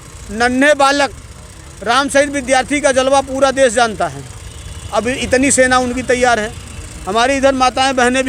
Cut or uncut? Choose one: uncut